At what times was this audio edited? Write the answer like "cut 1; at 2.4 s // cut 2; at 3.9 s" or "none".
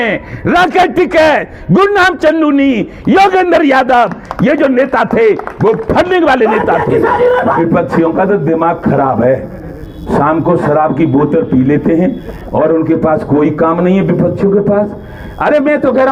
cut 1; at 7.6 s